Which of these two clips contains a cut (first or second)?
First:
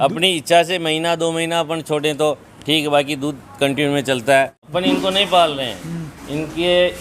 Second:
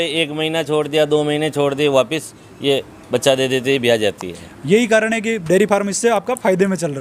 first